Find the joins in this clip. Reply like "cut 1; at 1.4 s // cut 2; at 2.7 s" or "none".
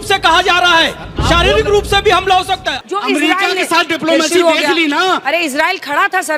cut 1; at 2.7 s